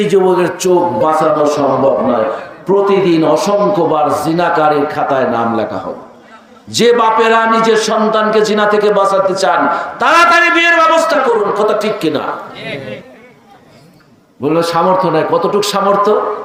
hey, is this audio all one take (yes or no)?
yes